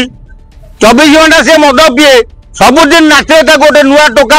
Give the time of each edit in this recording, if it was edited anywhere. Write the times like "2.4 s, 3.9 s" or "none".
2.4 s